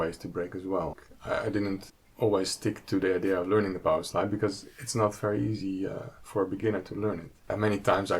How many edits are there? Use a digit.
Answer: 3